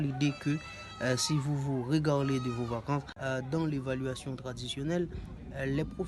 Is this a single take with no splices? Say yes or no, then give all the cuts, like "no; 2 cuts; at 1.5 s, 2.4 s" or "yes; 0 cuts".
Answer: no; 1 cut; at 3.1 s